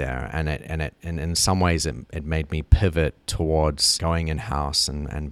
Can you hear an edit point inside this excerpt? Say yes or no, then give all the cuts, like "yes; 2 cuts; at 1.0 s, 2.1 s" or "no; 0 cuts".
yes; 1 cut; at 3.9 s